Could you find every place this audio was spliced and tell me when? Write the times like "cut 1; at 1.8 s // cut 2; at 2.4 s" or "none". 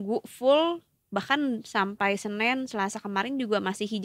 none